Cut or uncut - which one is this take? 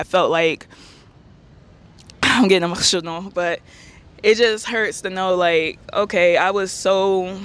uncut